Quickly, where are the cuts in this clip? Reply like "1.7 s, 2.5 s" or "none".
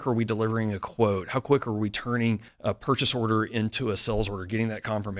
2.5 s